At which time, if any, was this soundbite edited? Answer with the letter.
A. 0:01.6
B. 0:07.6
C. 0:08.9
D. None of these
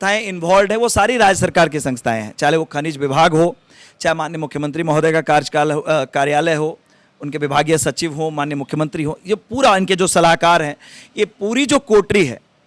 D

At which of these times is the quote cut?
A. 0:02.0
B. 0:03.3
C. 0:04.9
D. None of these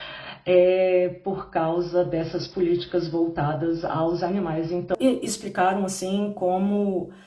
C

